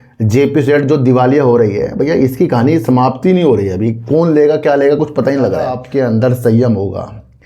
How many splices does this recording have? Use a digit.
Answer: 1